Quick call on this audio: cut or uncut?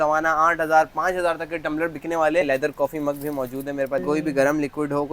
cut